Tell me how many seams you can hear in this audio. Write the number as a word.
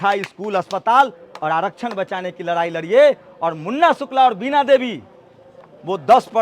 zero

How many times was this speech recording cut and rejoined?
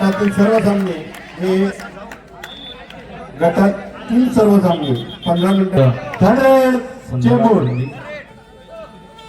one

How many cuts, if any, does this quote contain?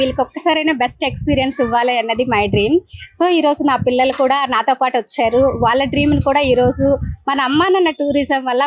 zero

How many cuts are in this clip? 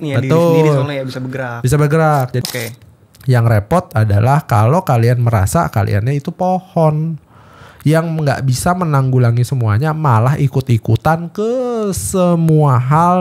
one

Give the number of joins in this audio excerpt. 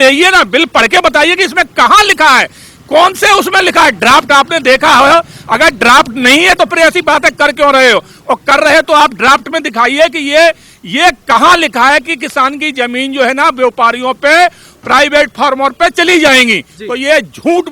zero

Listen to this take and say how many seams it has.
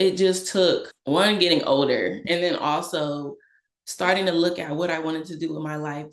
one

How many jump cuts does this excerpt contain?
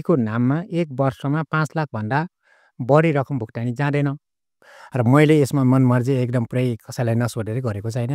one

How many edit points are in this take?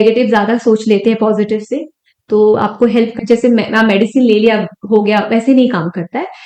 one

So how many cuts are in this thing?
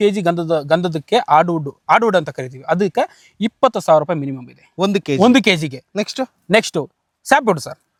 zero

